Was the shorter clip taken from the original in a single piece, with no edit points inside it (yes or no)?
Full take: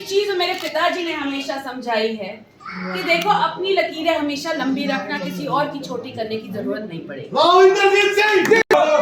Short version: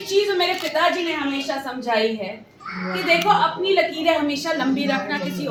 yes